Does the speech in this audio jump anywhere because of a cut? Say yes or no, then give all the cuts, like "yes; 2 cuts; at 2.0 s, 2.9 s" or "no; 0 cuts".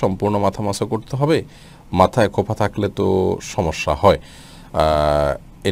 no; 0 cuts